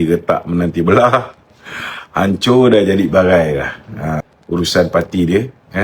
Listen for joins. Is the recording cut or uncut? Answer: cut